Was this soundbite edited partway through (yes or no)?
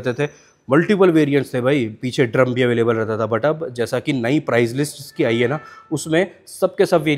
no